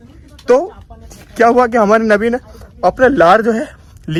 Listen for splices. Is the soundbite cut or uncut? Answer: uncut